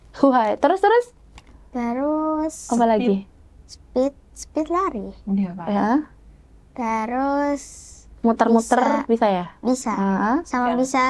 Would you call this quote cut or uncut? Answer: uncut